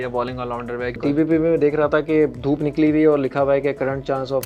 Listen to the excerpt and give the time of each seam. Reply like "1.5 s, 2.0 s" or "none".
1.0 s